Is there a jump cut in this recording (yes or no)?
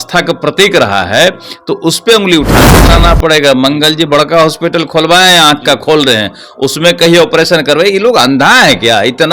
yes